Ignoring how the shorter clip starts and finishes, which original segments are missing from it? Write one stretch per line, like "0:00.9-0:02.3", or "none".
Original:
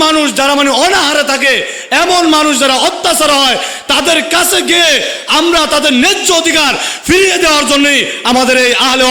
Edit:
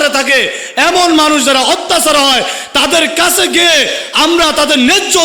none